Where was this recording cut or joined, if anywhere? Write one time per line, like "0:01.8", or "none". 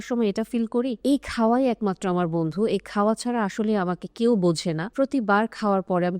0:01.0
0:04.8